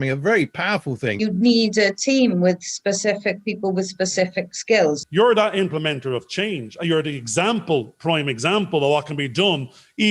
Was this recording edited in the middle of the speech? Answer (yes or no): yes